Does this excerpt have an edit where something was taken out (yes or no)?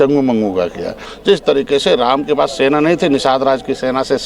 yes